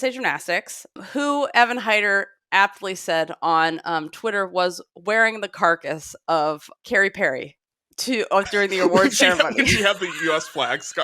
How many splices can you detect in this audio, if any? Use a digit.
2